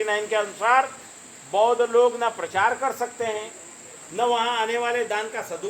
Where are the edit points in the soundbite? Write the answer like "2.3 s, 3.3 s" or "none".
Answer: none